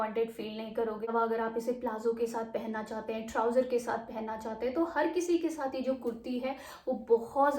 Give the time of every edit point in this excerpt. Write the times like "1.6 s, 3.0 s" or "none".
1.1 s